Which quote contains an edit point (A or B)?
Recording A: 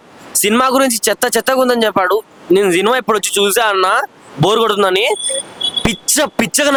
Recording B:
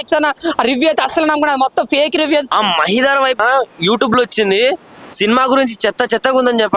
B